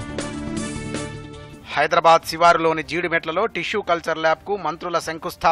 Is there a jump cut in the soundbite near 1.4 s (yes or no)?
yes